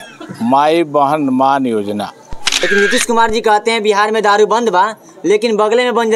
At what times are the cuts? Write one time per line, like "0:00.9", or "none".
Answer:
0:02.7